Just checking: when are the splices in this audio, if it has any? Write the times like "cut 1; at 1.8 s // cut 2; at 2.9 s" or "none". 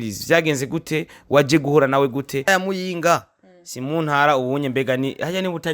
cut 1; at 2.5 s